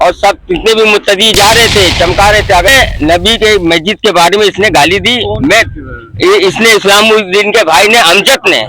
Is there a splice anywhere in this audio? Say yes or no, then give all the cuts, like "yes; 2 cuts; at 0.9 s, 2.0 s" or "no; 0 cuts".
yes; 1 cut; at 2.7 s